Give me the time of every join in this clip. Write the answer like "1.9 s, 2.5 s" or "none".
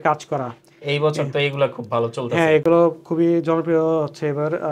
none